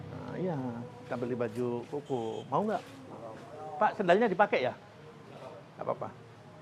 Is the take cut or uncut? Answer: uncut